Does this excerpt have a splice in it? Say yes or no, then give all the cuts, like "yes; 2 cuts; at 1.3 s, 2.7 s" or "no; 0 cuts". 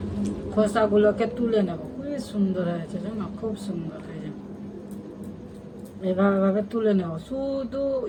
no; 0 cuts